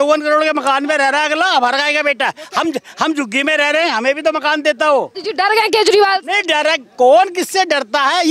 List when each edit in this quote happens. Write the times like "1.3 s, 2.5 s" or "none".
5.2 s